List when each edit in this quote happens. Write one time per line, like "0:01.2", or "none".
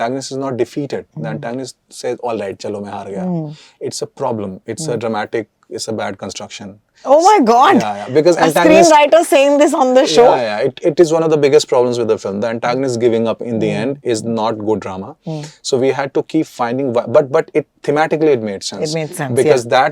none